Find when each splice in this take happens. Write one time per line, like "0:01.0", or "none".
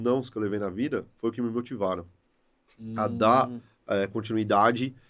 none